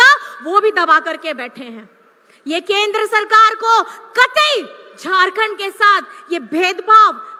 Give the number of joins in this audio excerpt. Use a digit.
0